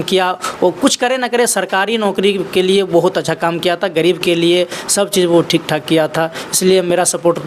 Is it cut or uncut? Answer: uncut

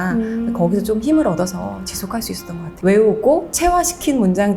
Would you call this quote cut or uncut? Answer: cut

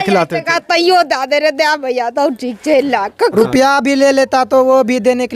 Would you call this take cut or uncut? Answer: cut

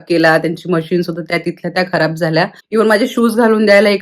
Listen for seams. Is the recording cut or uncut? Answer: cut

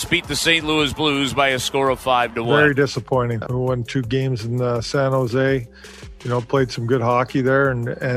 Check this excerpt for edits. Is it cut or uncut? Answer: cut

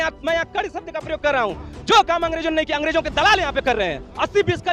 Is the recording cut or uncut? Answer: uncut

